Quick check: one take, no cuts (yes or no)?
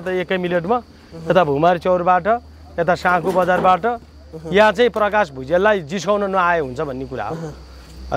yes